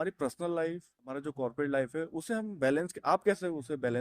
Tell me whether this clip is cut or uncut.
cut